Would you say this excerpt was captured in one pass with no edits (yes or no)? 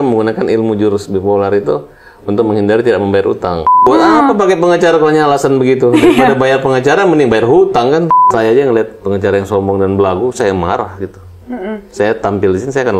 no